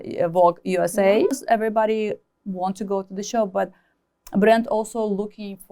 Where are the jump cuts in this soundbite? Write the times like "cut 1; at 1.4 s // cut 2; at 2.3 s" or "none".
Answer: cut 1; at 1.4 s

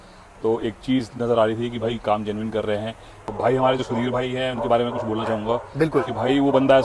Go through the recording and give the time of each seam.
cut 1; at 3.3 s

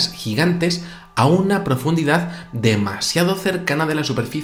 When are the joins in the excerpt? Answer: none

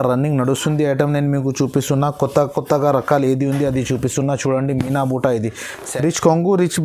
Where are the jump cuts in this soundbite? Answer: cut 1; at 5.7 s

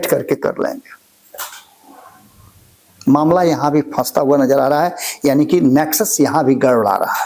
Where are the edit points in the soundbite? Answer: none

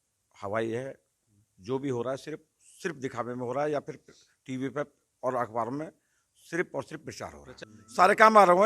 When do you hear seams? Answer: cut 1; at 7.5 s

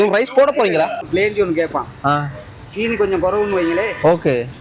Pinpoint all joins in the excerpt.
cut 1; at 1.1 s

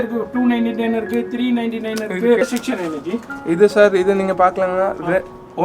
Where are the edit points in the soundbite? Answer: cut 1; at 2.4 s

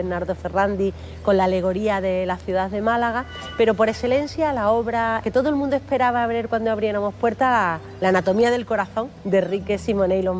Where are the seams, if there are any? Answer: cut 1; at 5.2 s // cut 2; at 9.0 s

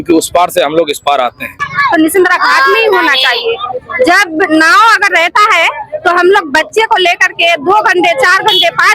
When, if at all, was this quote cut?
cut 1; at 1.5 s

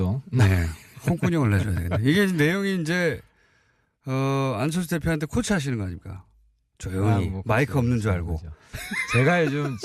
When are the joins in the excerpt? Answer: cut 1; at 2.6 s

